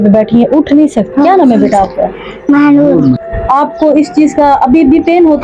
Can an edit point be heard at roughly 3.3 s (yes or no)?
yes